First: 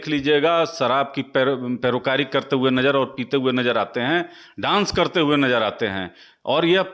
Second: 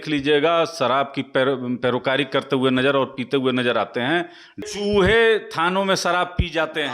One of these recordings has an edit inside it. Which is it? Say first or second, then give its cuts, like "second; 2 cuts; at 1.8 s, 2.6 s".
second; 1 cut; at 4.6 s